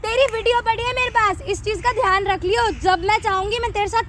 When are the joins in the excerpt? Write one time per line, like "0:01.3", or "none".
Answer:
none

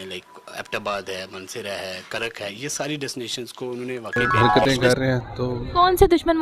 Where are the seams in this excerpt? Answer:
0:04.2

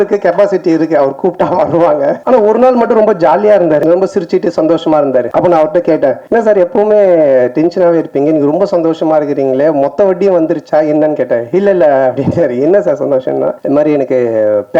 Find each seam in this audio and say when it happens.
0:02.2
0:03.8
0:05.3
0:06.2
0:13.6

